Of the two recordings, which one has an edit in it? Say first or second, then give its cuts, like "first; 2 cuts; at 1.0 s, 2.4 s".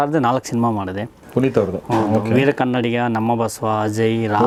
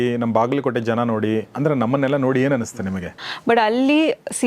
second; 1 cut; at 3.2 s